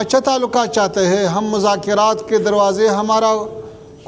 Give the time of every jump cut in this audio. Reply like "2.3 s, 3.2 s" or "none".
none